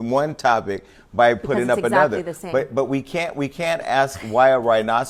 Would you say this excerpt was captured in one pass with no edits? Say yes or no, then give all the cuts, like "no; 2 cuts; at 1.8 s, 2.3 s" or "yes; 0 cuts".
yes; 0 cuts